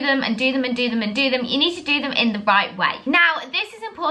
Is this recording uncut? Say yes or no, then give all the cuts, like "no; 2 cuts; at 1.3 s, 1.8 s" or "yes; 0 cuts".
no; 1 cut; at 3.0 s